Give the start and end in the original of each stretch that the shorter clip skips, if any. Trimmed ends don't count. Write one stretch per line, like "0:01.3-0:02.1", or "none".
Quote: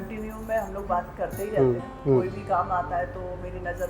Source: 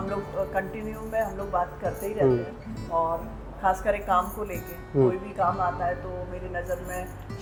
0:02.5-0:04.8